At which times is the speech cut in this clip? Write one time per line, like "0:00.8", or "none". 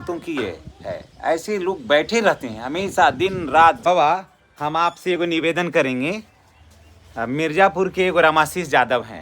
0:03.9

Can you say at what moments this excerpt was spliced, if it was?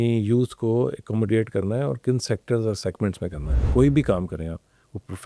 0:03.5

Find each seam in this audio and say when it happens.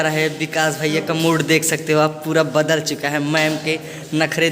none

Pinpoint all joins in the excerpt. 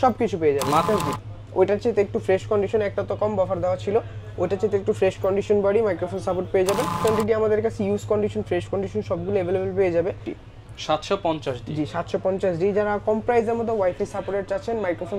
0:00.9
0:07.0
0:10.3

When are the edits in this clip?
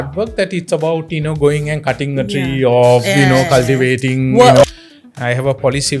0:04.7

